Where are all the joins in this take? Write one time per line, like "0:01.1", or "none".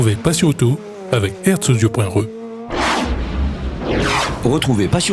none